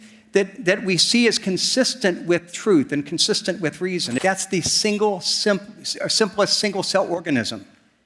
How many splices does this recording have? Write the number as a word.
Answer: one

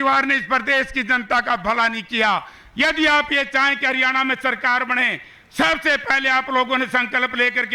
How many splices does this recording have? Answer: zero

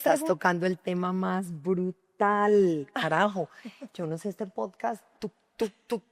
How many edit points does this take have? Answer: zero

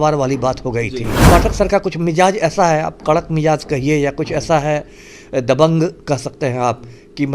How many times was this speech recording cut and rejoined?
one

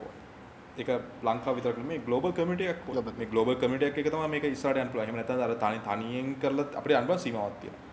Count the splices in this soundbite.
zero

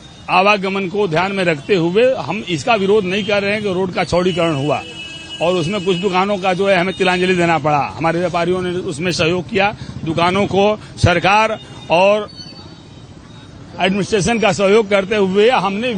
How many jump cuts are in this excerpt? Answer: zero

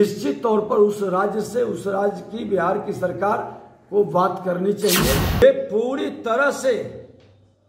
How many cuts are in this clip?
one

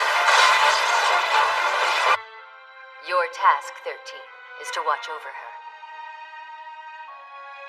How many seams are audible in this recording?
one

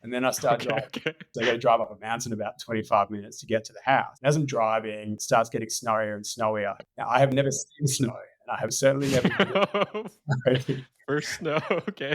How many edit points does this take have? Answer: four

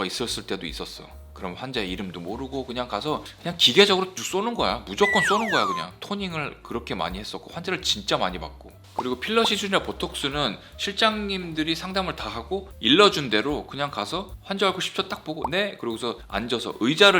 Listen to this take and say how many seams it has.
zero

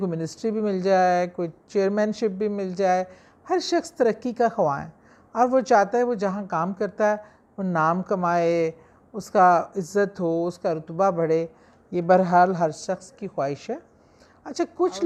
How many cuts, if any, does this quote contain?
zero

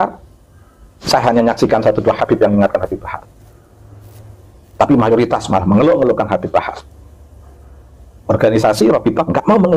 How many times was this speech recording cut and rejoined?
zero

